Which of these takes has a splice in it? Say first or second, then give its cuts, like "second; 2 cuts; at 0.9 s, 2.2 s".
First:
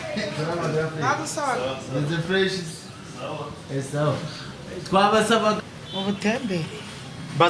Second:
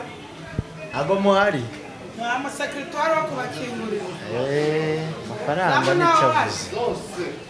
first; 1 cut; at 5.6 s